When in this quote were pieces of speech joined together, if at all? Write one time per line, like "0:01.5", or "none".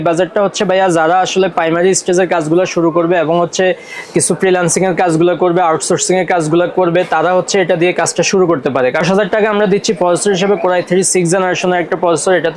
0:09.0